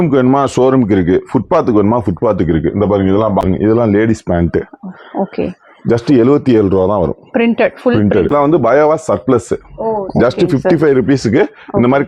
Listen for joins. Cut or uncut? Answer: cut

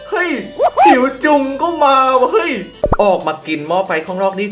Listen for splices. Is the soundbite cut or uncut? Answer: cut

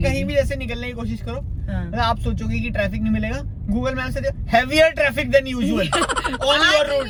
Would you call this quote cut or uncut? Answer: uncut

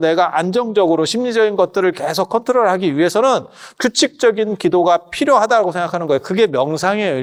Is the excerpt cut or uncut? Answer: uncut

